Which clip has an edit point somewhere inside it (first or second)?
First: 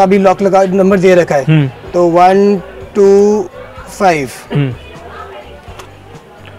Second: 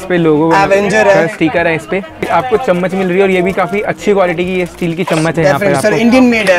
second